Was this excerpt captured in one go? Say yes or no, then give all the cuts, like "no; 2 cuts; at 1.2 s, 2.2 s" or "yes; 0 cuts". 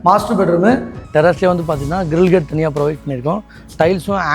no; 1 cut; at 1.0 s